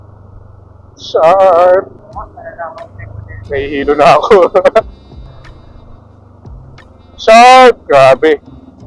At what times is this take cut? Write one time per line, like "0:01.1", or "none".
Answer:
0:02.0
0:05.2